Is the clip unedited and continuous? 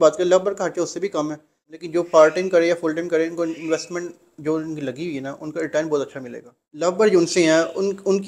no; 2 cuts; at 1.7 s, 6.8 s

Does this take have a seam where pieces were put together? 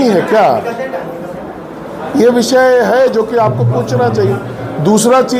no; 0 cuts

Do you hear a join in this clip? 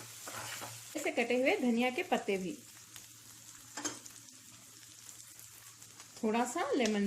yes; 1 cut; at 1.0 s

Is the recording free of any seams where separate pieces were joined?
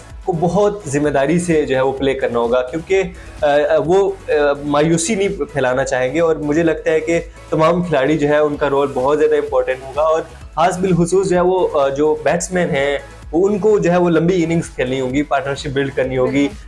yes; 0 cuts

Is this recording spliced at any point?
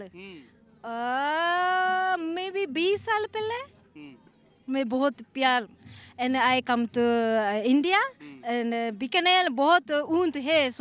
no; 0 cuts

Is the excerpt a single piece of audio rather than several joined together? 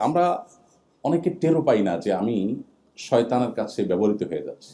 yes; 0 cuts

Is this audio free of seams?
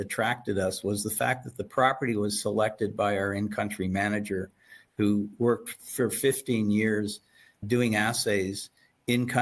yes; 0 cuts

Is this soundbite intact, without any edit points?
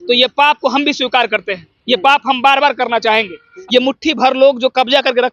no; 1 cut; at 3.6 s

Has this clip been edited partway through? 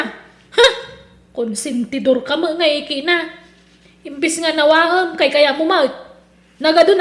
no; 0 cuts

